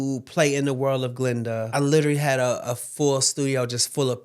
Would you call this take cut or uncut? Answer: cut